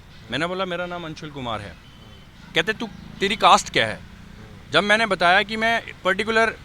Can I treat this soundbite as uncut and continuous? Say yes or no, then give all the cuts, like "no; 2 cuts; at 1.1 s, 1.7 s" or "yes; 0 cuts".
yes; 0 cuts